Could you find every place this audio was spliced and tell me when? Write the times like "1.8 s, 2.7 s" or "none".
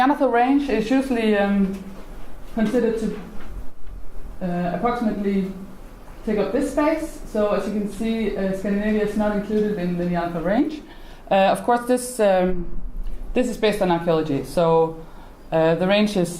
7.7 s